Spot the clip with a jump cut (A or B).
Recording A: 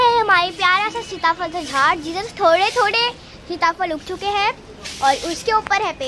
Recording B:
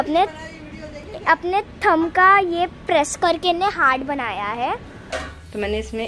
B